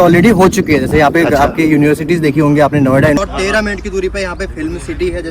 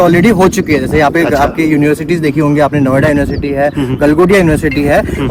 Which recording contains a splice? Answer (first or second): first